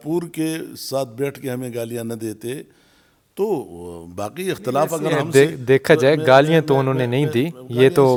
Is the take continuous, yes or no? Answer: yes